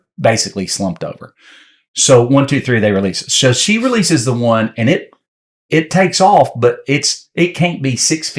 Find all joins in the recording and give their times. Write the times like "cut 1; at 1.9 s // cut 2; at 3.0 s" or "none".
none